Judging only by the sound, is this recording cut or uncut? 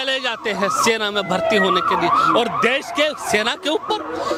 uncut